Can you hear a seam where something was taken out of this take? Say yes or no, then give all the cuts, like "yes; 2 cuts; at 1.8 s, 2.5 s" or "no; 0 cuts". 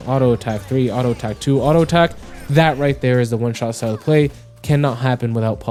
no; 0 cuts